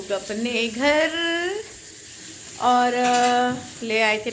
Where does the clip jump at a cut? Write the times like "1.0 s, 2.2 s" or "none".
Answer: none